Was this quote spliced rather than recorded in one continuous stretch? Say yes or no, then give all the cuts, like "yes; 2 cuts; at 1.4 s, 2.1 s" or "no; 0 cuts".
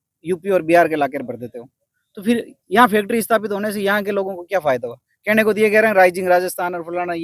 no; 0 cuts